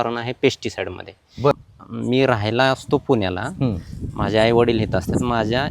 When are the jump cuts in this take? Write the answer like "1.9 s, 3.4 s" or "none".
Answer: 1.5 s